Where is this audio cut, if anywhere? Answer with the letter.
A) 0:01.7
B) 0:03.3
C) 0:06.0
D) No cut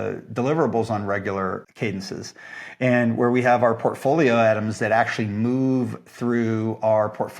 A